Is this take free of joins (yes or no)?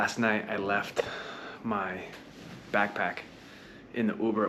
yes